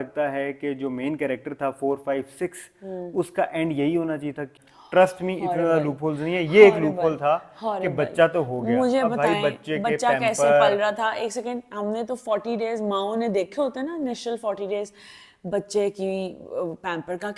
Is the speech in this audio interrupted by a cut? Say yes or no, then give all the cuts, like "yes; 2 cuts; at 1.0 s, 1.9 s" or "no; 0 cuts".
yes; 1 cut; at 4.5 s